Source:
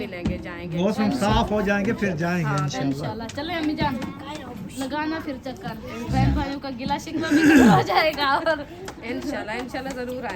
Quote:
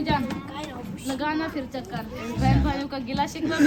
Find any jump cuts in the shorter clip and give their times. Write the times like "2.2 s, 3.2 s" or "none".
none